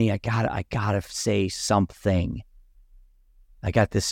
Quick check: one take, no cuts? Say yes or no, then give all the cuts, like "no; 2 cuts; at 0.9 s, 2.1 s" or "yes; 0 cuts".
yes; 0 cuts